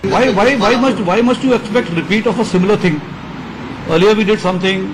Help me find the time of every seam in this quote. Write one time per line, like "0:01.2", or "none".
none